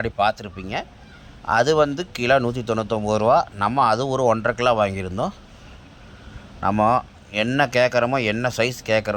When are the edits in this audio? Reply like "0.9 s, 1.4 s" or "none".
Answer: none

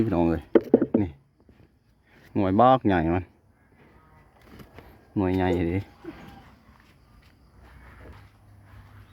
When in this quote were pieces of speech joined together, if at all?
8.1 s

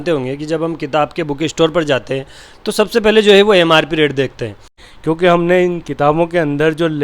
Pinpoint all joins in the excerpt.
4.8 s

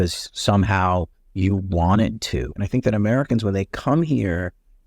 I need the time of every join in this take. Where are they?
2.5 s

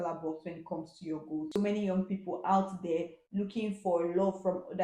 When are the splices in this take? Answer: 1.5 s

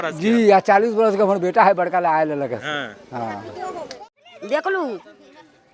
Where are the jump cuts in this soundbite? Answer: 3.9 s

